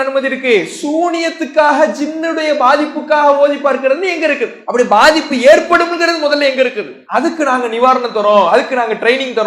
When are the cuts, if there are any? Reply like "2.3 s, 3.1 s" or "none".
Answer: none